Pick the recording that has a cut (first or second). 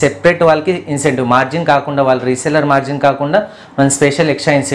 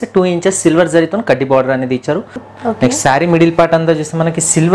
second